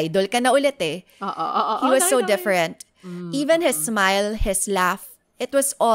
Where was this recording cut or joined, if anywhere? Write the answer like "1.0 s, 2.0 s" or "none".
none